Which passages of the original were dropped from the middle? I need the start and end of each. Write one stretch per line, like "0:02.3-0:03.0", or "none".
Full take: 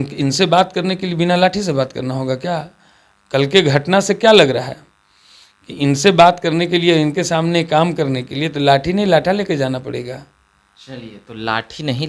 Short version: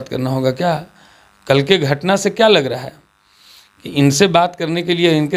none